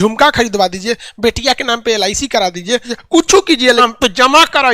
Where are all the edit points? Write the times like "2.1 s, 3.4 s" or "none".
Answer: 2.9 s, 3.8 s

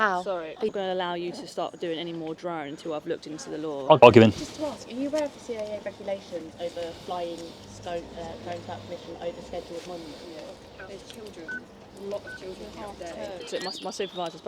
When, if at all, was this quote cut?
0.7 s, 4.0 s, 10.6 s, 13.5 s

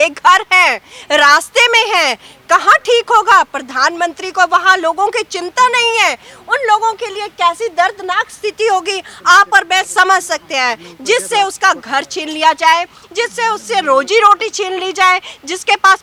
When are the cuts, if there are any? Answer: none

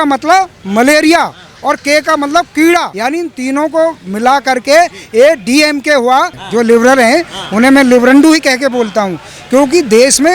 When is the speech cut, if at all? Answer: 2.9 s, 6.4 s

